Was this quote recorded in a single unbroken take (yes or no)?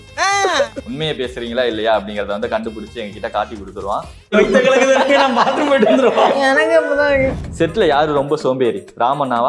no